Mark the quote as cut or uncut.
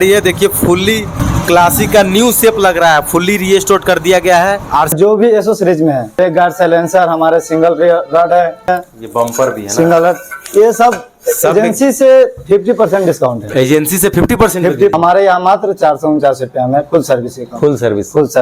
cut